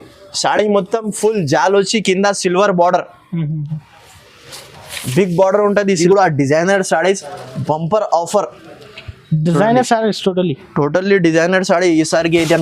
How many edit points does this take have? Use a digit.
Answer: 1